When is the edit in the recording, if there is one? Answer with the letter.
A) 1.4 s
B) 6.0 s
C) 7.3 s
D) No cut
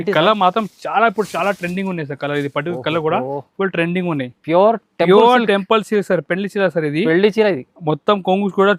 D